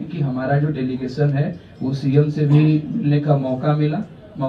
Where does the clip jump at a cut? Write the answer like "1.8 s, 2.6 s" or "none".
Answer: none